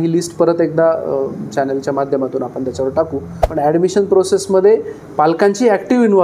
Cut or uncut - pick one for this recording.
cut